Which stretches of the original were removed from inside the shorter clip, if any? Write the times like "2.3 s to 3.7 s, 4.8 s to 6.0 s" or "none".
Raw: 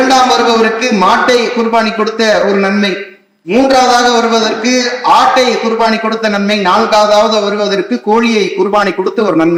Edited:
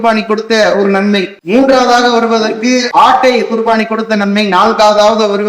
3.0 s to 3.4 s, 4.9 s to 5.0 s